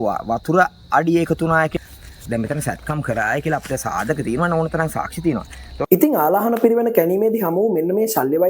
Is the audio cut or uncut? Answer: cut